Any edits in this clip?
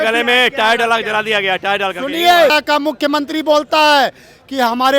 yes; 1 cut; at 2.5 s

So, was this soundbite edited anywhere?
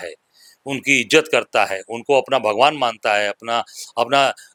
no; 0 cuts

